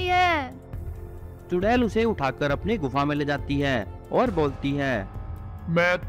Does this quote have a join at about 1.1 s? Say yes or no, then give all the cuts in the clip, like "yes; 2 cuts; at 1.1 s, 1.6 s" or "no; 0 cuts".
no; 0 cuts